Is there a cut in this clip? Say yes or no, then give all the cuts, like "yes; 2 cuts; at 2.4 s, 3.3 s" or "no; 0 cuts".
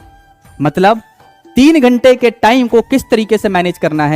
no; 0 cuts